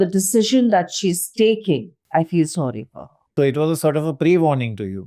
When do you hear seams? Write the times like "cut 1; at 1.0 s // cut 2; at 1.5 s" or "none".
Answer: cut 1; at 2.0 s // cut 2; at 3.1 s